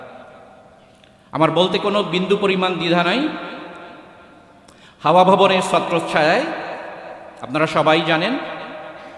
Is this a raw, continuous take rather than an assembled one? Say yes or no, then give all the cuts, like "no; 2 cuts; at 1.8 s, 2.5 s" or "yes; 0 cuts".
yes; 0 cuts